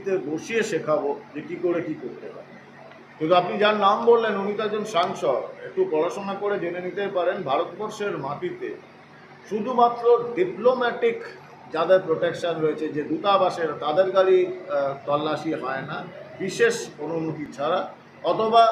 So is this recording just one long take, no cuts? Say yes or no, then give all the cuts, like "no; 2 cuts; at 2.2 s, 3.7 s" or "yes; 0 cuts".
yes; 0 cuts